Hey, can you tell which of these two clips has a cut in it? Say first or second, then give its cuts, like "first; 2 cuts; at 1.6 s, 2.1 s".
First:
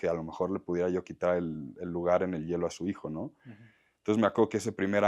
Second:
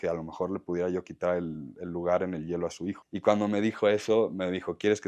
second; 1 cut; at 3.0 s